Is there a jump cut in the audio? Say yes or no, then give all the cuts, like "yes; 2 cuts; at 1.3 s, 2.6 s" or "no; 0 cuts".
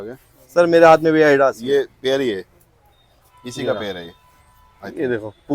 no; 0 cuts